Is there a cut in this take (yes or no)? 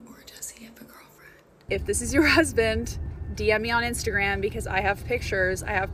yes